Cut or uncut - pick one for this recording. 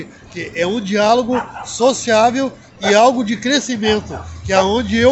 uncut